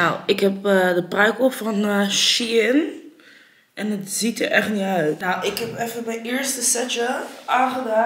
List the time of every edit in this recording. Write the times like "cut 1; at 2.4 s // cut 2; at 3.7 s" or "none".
cut 1; at 5.2 s